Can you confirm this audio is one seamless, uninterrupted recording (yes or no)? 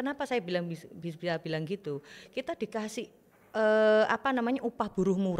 yes